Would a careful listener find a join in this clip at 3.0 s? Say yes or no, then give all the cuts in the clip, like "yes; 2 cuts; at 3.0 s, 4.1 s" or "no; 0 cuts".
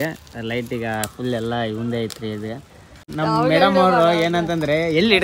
yes; 1 cut; at 3.0 s